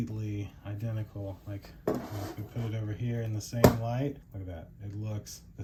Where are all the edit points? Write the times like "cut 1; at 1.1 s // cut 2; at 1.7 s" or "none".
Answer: none